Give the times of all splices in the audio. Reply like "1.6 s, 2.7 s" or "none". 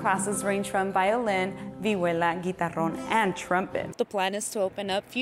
3.9 s